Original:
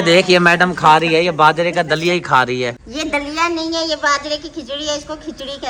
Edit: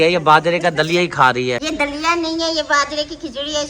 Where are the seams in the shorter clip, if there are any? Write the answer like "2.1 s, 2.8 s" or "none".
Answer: 1.6 s